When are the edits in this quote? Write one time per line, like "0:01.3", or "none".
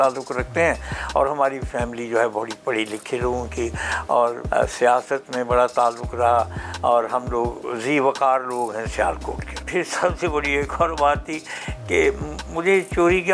0:04.4
0:09.6